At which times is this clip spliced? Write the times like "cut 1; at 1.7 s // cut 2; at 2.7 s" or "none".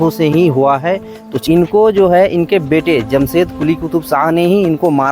cut 1; at 1.4 s